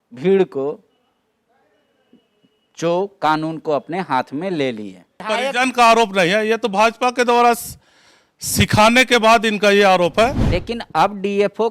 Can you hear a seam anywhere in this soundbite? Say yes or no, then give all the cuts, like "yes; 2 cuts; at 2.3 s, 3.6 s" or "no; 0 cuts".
yes; 2 cuts; at 5.2 s, 10.5 s